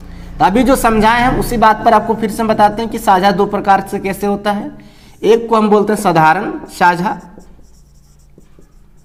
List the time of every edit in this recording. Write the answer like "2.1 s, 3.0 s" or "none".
none